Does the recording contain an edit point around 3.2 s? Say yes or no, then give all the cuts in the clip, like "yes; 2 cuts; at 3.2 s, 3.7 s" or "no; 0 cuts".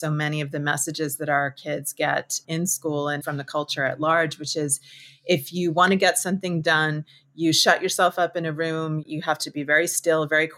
yes; 2 cuts; at 3.2 s, 9.0 s